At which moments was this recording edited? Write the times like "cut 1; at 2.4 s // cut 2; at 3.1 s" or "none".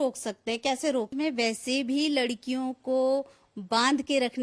cut 1; at 1.1 s